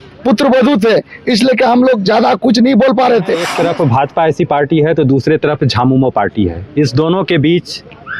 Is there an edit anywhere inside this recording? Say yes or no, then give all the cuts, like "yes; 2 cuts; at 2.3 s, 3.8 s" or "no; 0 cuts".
yes; 1 cut; at 3.5 s